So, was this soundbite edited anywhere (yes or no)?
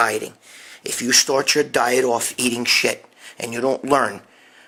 no